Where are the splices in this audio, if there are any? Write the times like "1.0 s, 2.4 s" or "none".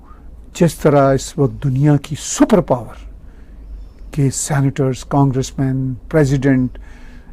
none